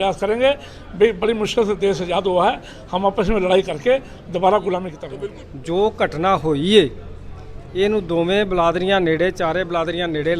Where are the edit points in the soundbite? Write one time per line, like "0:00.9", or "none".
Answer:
0:05.0